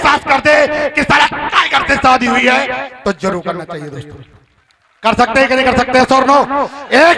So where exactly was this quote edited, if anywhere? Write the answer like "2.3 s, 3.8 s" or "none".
none